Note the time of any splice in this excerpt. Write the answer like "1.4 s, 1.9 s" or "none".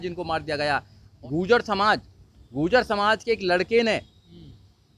1.1 s